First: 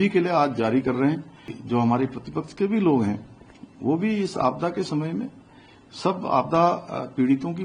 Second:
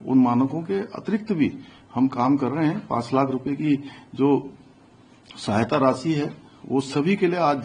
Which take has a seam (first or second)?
first